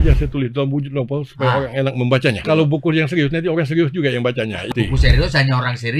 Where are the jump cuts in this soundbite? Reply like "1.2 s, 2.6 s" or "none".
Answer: 2.4 s, 4.7 s